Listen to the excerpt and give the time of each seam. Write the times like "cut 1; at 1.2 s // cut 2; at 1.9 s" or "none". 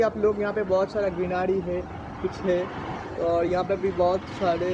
none